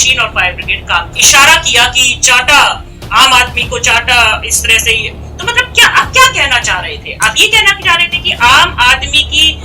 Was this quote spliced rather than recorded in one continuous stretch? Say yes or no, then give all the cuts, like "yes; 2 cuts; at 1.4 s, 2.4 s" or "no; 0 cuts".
yes; 1 cut; at 1.2 s